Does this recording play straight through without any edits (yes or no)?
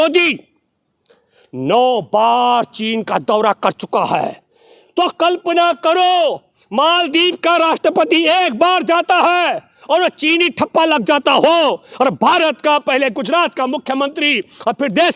yes